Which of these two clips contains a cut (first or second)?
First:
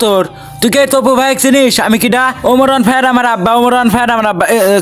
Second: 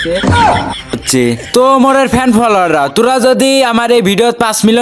second